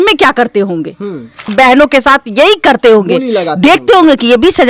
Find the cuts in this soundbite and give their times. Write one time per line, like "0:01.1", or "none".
0:01.5